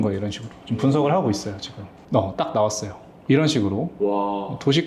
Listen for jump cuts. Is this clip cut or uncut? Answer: uncut